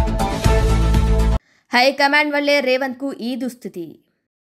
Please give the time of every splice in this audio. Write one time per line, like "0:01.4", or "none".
0:01.1